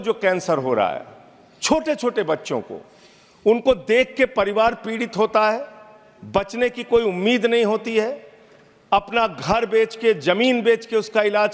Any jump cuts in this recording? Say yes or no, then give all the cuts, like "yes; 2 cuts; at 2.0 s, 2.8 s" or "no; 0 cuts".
no; 0 cuts